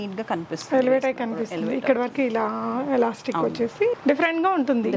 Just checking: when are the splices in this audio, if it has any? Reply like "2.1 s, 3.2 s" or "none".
4.0 s